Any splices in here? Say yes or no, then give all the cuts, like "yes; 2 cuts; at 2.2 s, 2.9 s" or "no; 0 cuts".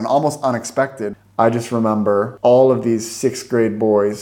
yes; 2 cuts; at 1.1 s, 2.3 s